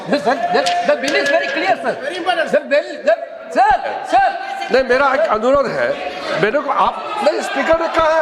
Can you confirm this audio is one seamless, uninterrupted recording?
yes; 0 cuts

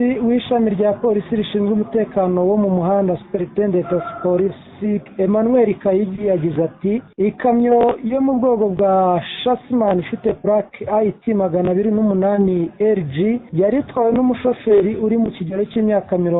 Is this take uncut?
no; 3 cuts; at 5.1 s, 7.1 s, 13.5 s

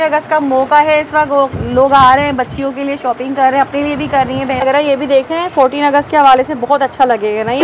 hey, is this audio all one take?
no; 1 cut; at 4.6 s

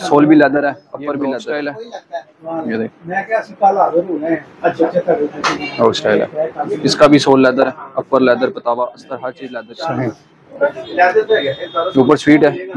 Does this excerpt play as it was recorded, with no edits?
no; 2 cuts; at 1.9 s, 9.4 s

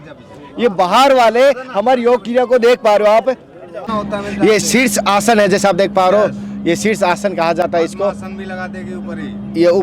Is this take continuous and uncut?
no; 1 cut; at 3.9 s

